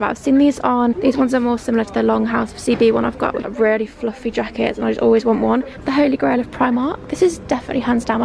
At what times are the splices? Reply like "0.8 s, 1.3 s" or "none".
1.0 s, 3.5 s, 5.8 s